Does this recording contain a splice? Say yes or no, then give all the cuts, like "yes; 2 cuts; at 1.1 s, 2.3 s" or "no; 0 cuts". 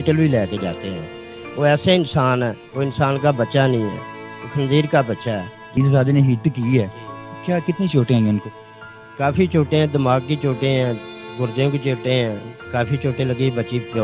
yes; 1 cut; at 5.8 s